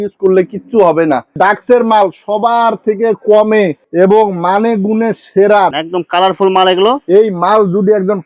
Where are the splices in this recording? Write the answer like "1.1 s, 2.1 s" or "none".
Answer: 1.4 s, 5.7 s